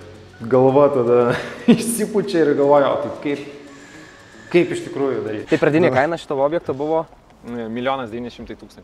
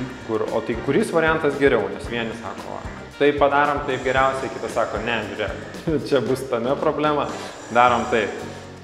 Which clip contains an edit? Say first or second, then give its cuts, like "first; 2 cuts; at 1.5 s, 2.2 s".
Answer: first; 1 cut; at 5.3 s